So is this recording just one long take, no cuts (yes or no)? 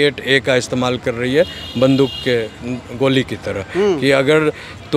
yes